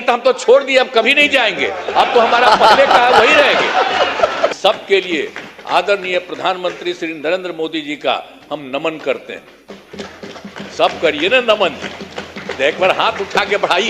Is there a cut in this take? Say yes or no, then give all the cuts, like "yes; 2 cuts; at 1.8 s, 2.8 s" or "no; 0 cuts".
yes; 1 cut; at 4.6 s